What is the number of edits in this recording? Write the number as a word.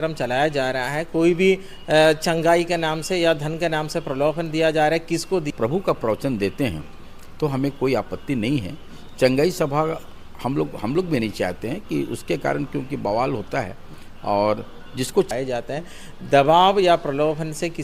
two